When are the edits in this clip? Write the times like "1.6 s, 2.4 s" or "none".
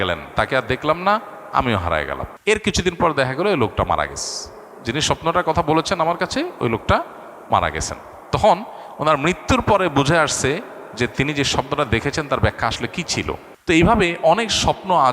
2.3 s, 13.5 s